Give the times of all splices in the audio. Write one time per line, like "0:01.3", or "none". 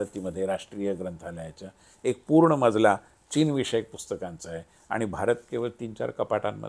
none